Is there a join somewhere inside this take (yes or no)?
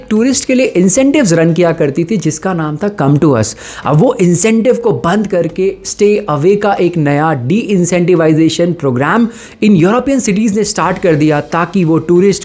no